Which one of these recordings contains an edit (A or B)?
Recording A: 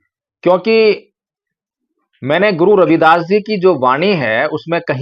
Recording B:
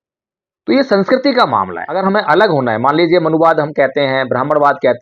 B